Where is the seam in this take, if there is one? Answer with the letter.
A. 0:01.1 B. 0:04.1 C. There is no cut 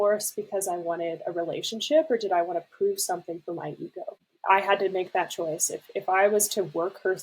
B